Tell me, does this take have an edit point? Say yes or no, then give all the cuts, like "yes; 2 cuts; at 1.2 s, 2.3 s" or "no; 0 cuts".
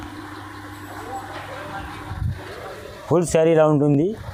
no; 0 cuts